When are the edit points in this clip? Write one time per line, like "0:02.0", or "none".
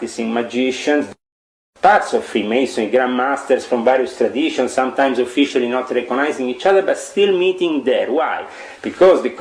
0:01.1